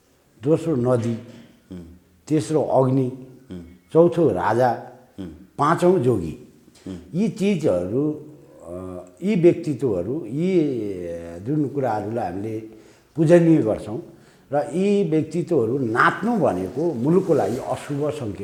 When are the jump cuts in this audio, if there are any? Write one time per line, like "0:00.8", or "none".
none